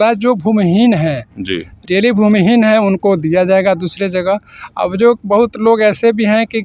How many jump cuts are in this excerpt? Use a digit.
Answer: 0